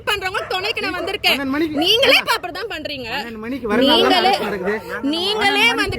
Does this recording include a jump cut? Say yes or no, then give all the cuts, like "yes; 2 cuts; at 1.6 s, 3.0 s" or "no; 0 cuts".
no; 0 cuts